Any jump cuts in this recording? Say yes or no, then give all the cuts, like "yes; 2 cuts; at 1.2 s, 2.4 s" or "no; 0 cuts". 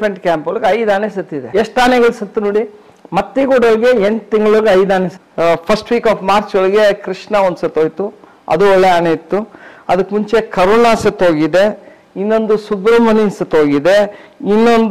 yes; 2 cuts; at 1.5 s, 5.1 s